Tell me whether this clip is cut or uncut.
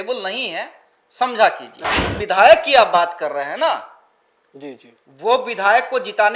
cut